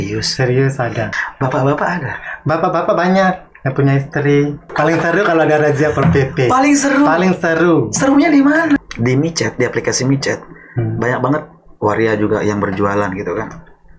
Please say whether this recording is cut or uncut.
cut